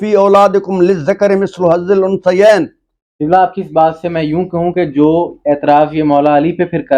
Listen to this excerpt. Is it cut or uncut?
cut